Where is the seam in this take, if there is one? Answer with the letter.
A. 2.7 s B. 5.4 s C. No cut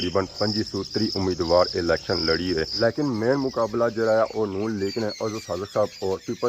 A